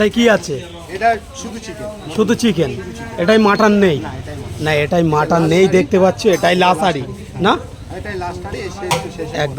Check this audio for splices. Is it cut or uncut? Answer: uncut